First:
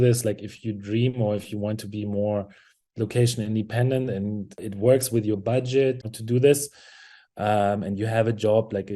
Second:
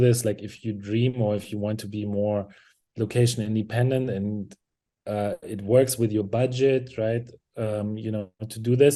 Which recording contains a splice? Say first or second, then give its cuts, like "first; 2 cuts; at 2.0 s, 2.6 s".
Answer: first; 2 cuts; at 4.6 s, 6.0 s